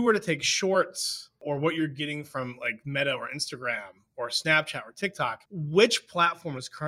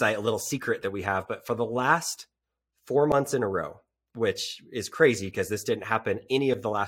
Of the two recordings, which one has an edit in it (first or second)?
first